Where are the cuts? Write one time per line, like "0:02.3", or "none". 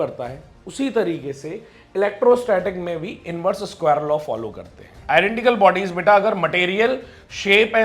0:04.9